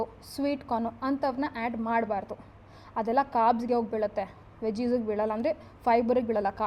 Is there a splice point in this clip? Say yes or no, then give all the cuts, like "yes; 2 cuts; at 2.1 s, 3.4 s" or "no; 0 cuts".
no; 0 cuts